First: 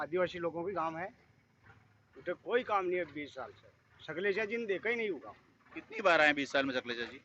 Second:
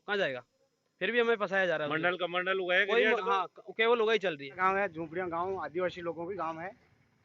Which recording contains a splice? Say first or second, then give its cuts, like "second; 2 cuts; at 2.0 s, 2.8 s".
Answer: second; 1 cut; at 4.6 s